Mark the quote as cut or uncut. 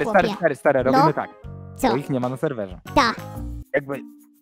uncut